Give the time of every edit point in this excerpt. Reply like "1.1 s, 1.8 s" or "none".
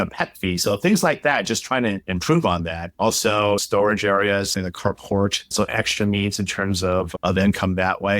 3.6 s

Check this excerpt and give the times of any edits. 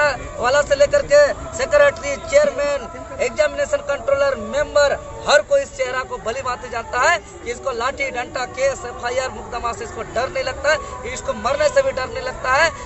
none

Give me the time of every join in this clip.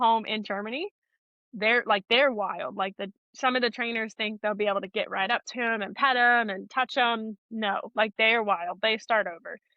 none

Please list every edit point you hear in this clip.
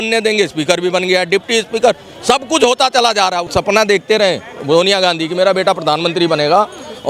3.5 s

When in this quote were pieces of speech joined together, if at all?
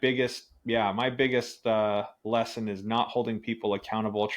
none

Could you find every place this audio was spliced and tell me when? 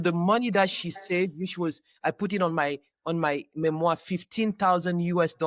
none

